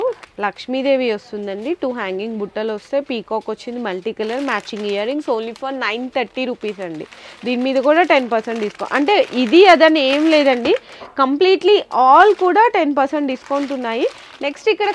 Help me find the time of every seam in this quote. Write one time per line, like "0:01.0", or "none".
none